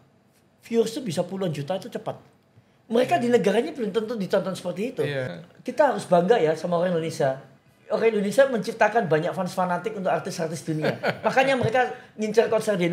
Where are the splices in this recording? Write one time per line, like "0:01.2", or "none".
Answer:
0:05.3